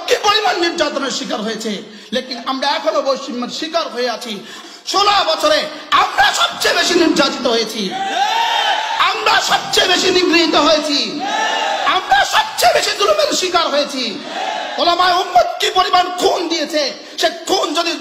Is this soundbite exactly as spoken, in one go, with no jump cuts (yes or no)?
no